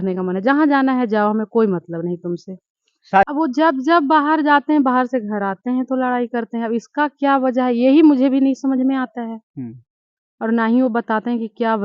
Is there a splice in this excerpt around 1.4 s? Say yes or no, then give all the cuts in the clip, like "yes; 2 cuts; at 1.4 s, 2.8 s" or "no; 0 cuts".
no; 1 cut; at 3.3 s